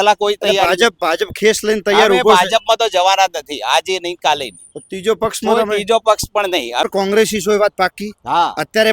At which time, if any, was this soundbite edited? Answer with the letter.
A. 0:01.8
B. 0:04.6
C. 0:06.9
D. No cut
C